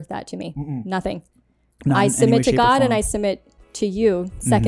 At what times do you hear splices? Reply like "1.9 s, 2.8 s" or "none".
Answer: none

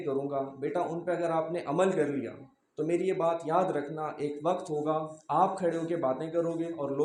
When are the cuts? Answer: none

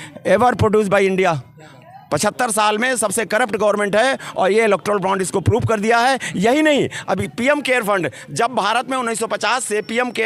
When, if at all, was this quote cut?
none

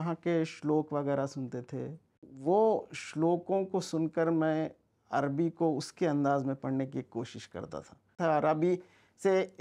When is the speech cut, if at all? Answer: 2.3 s, 8.1 s

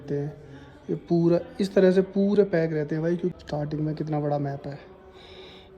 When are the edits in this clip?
3.4 s

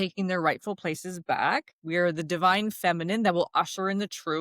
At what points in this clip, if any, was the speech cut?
1.8 s

